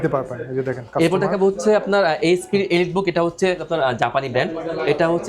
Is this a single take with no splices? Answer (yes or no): no